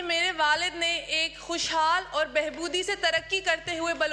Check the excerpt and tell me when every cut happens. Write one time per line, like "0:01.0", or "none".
none